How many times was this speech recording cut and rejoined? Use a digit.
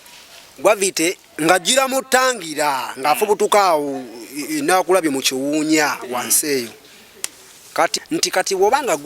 1